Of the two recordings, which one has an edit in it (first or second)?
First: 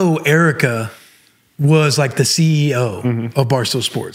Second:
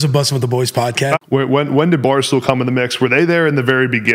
second